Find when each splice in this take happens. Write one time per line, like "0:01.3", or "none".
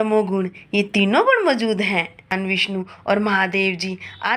0:02.3